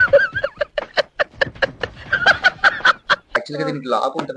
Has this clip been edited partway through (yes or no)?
yes